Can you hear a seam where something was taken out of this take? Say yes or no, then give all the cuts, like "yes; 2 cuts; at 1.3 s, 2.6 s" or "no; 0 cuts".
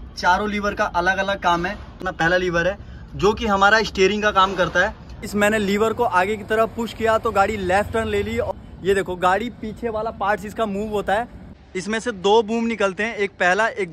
yes; 4 cuts; at 2.1 s, 5.3 s, 8.5 s, 11.5 s